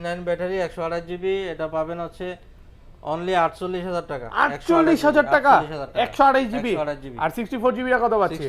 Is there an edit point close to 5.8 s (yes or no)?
no